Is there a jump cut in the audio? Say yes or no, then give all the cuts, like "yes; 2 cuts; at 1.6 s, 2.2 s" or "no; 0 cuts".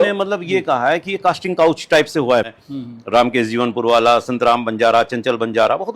yes; 1 cut; at 2.5 s